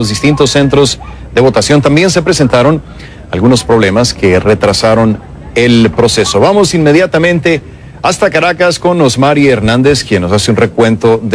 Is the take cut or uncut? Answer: cut